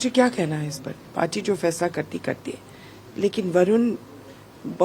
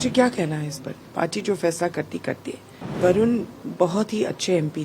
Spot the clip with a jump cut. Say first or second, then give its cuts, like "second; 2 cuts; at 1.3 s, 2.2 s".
second; 2 cuts; at 3.0 s, 3.6 s